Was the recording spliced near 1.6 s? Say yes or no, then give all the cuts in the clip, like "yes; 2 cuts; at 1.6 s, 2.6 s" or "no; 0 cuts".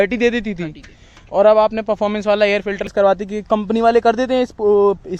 no; 1 cut; at 2.9 s